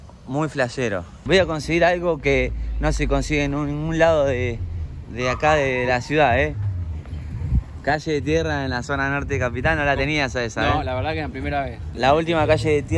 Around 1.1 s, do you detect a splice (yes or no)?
yes